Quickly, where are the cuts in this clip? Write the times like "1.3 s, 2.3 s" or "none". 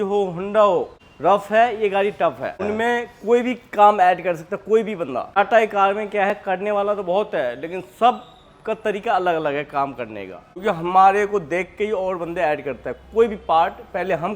1.0 s, 2.6 s, 5.4 s, 10.4 s